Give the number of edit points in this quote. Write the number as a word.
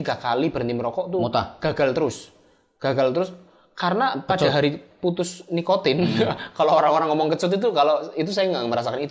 zero